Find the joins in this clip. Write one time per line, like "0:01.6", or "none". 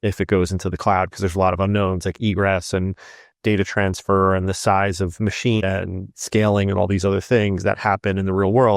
0:05.6